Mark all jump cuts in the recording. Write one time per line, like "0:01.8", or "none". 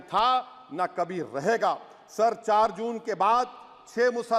none